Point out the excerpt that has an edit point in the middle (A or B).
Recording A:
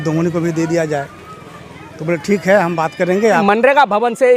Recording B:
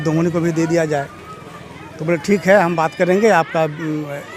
A